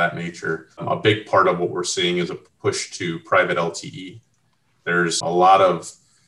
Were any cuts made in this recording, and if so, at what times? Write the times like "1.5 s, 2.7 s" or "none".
0.8 s, 5.2 s